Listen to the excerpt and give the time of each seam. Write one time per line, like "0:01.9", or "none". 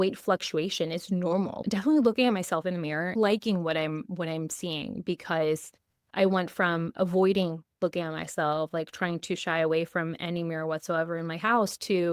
0:01.6
0:03.1
0:06.0